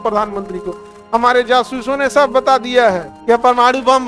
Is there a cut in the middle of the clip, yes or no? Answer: yes